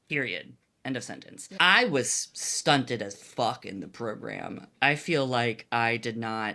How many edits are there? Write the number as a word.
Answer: one